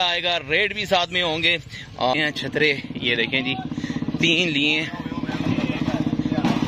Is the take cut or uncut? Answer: cut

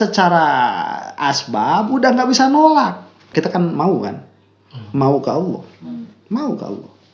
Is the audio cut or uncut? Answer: cut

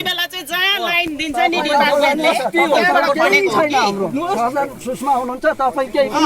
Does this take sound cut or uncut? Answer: uncut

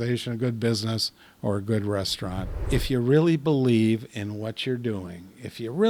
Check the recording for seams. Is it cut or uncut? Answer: cut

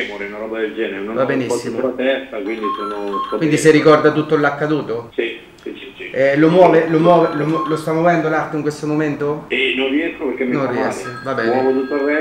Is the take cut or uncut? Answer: uncut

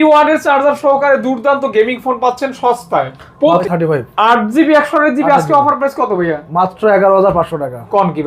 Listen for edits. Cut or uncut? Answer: cut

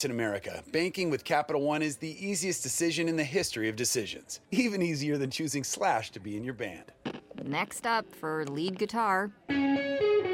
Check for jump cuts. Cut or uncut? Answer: uncut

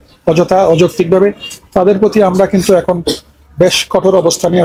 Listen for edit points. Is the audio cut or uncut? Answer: uncut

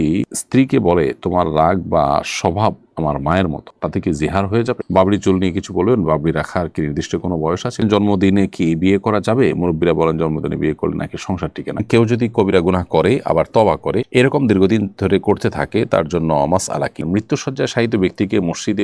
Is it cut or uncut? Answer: cut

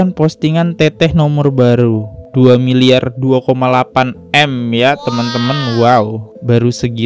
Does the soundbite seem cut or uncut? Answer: uncut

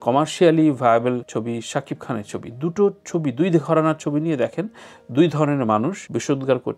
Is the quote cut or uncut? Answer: uncut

